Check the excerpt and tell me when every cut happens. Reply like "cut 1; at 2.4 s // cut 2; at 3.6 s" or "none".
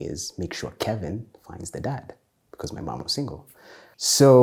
none

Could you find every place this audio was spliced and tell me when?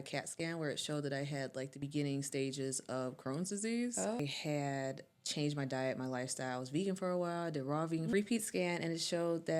cut 1; at 4.2 s // cut 2; at 8.1 s

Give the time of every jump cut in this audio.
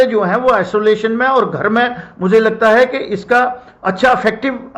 none

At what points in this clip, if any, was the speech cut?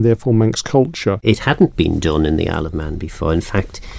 cut 1; at 1.2 s

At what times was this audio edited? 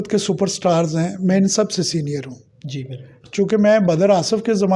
none

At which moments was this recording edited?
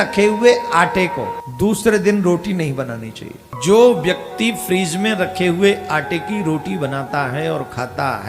cut 1; at 1.4 s // cut 2; at 3.4 s

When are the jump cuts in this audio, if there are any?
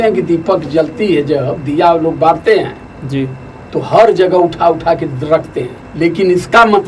cut 1; at 5.8 s

